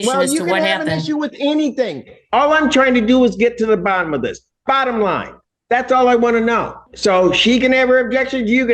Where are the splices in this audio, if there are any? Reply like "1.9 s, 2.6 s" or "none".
6.8 s